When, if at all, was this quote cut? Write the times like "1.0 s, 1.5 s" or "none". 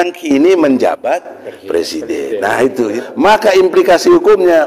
2.9 s